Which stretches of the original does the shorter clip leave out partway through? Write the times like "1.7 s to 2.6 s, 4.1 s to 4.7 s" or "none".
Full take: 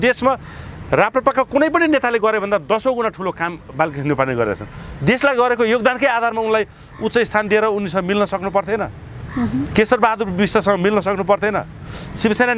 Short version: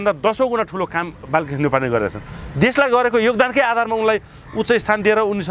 none